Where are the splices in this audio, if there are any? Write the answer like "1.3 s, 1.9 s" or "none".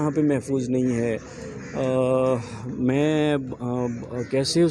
none